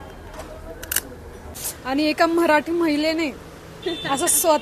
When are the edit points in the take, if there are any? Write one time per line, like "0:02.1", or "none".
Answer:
0:01.6

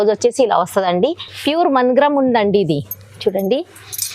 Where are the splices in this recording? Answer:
0:01.1

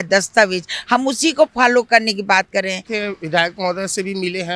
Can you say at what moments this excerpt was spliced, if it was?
0:02.9

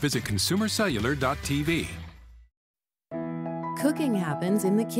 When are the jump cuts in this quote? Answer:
0:02.1

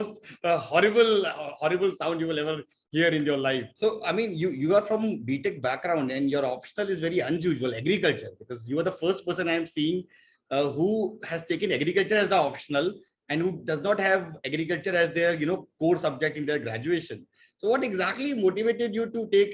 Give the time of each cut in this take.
0:03.7

